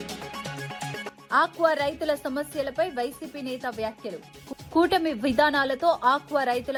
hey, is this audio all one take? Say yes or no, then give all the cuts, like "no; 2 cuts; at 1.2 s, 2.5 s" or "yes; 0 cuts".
yes; 0 cuts